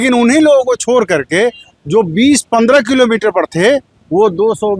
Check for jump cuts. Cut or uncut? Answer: uncut